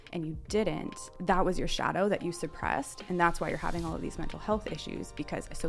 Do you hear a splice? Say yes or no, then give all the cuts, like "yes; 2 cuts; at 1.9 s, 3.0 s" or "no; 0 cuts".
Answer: yes; 1 cut; at 1.0 s